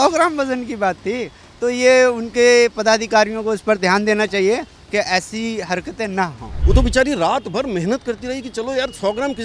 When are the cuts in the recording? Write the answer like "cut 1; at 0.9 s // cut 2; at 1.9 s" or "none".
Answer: cut 1; at 6.5 s